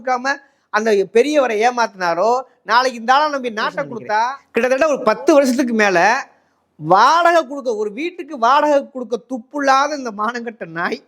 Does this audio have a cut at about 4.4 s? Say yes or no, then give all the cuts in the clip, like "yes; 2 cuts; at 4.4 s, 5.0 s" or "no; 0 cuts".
yes; 1 cut; at 4.4 s